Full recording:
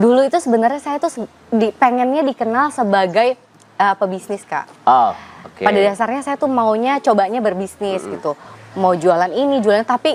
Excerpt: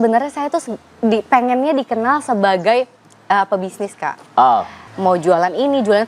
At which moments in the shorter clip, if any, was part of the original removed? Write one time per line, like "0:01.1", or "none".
0:04.8

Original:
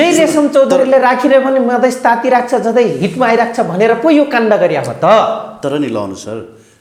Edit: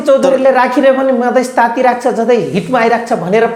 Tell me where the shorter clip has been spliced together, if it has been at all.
none

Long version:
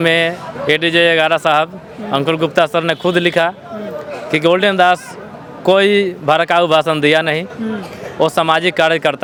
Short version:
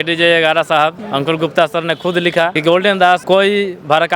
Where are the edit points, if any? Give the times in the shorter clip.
0:01.0
0:02.6
0:03.2

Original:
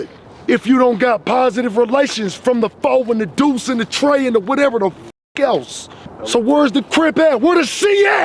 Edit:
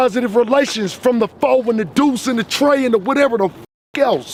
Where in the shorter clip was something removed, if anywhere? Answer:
none

